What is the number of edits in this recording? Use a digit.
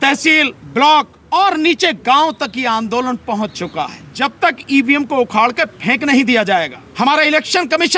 3